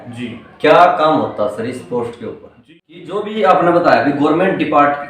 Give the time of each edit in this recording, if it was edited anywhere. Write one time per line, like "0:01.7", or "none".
0:02.5